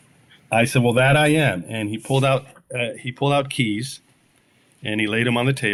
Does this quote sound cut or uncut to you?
uncut